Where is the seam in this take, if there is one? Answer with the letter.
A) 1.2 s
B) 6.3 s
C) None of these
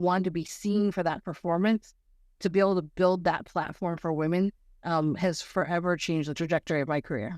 B